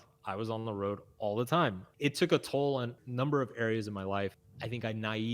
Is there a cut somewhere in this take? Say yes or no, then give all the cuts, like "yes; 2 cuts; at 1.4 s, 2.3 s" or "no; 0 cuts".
yes; 3 cuts; at 1.8 s, 3.0 s, 4.4 s